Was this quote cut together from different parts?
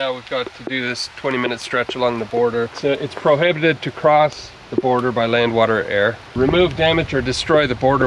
yes; 2 cuts; at 2.7 s, 6.2 s

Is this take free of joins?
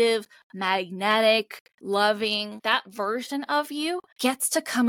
no; 3 cuts; at 1.7 s, 2.6 s, 4.1 s

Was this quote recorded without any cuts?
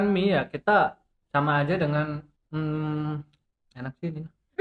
no; 2 cuts; at 1.1 s, 2.3 s

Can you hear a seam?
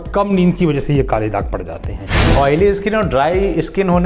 yes; 1 cut; at 2.3 s

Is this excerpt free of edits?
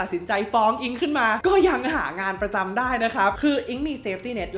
yes; 0 cuts

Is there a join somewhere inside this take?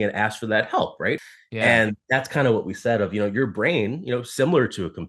yes; 1 cut; at 1.2 s

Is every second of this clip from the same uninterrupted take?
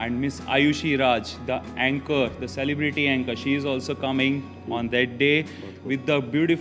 yes; 0 cuts

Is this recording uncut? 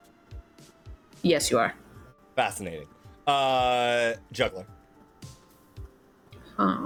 yes; 0 cuts

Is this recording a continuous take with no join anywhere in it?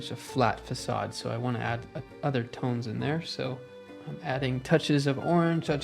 yes; 0 cuts

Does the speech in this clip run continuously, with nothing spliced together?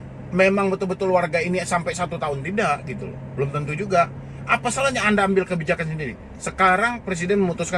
yes; 0 cuts

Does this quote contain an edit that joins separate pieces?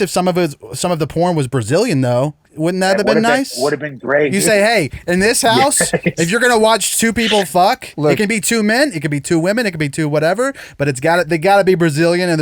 yes; 2 cuts; at 2.5 s, 4.3 s

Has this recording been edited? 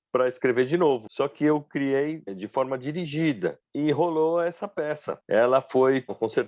yes; 4 cuts; at 1.1 s, 2.4 s, 3.6 s, 5.1 s

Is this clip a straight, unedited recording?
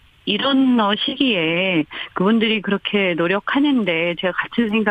yes; 0 cuts

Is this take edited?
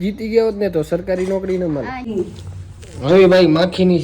yes; 1 cut; at 2.0 s

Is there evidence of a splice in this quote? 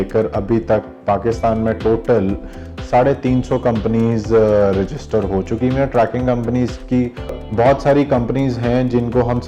yes; 1 cut; at 7.3 s

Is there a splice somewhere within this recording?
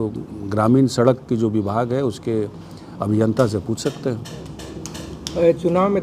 no; 0 cuts

